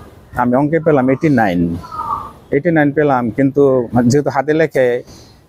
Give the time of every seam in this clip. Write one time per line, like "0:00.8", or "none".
none